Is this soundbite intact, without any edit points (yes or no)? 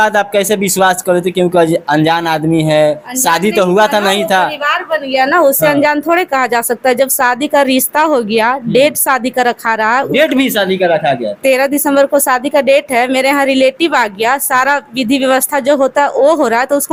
yes